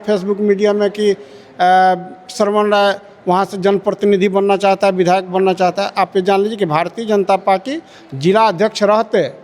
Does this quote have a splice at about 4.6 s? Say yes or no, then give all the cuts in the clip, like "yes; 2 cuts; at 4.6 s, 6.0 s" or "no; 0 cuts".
no; 0 cuts